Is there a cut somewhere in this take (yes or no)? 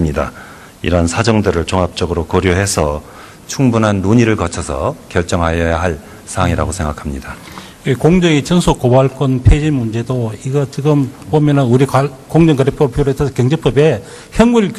no